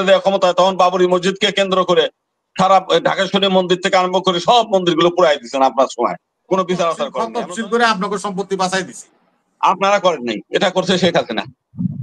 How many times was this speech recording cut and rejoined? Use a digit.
1